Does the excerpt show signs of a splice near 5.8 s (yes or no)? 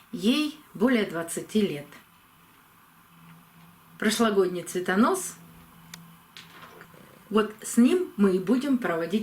no